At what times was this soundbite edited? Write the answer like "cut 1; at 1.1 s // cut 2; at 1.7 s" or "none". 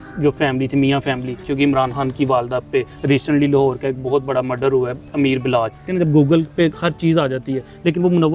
cut 1; at 1.5 s // cut 2; at 2.9 s // cut 3; at 5.9 s